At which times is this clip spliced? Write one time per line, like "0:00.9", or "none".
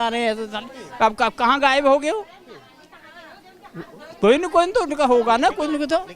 none